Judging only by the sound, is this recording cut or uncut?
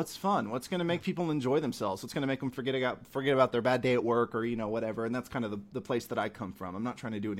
uncut